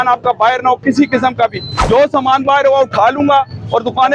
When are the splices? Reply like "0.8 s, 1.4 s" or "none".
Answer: 1.7 s